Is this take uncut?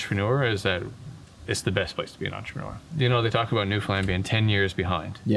no; 1 cut; at 2.8 s

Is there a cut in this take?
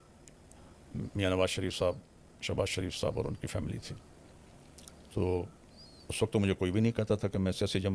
no; 0 cuts

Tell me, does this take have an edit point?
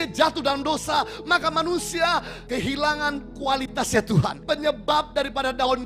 yes; 2 cuts; at 2.4 s, 4.4 s

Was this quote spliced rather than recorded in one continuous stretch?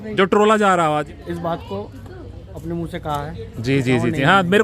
yes; 1 cut; at 1.0 s

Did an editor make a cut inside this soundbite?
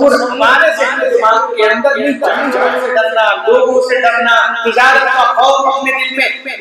yes; 1 cut; at 2.5 s

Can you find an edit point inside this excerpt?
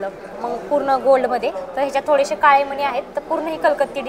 no; 0 cuts

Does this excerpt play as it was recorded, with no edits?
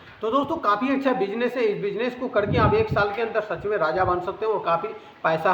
yes; 0 cuts

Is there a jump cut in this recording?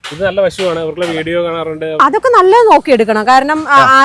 yes; 1 cut; at 2.0 s

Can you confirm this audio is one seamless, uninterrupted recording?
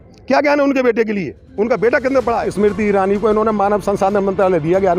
no; 1 cut; at 2.5 s

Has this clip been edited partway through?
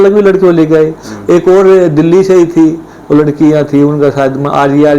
no; 0 cuts

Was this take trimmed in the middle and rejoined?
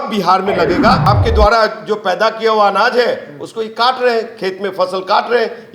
yes; 1 cut; at 1.1 s

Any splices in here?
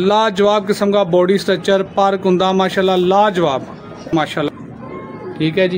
yes; 1 cut; at 4.5 s

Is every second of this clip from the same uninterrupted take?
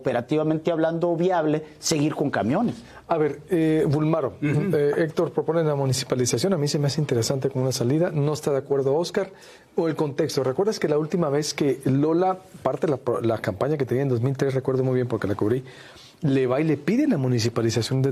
yes; 0 cuts

